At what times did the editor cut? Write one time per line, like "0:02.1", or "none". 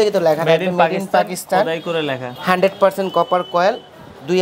0:02.3